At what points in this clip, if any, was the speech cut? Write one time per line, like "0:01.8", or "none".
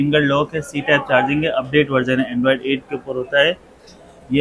none